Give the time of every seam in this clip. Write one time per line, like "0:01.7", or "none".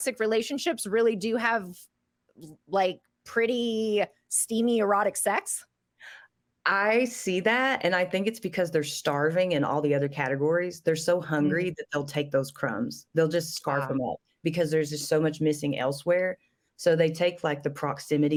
none

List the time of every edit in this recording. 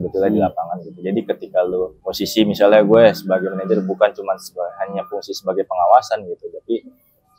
0:02.0

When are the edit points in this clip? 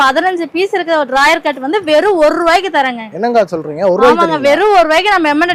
none

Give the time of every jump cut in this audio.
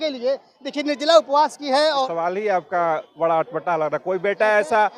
0:02.1

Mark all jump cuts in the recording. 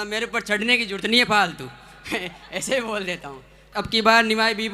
0:03.7

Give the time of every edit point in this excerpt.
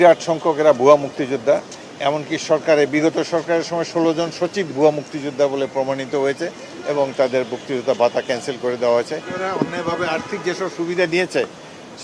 0:09.3

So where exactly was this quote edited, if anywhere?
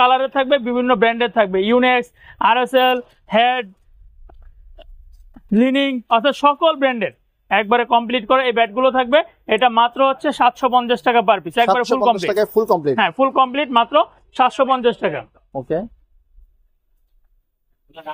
none

